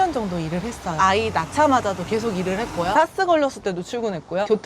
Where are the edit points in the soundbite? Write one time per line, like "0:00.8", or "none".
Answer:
0:01.0